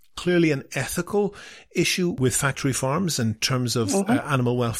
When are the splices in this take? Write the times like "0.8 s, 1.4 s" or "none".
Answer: 2.2 s